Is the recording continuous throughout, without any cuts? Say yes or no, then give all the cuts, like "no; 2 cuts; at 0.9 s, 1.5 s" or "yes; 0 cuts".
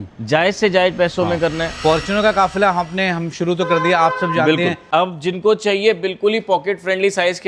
no; 2 cuts; at 1.7 s, 4.8 s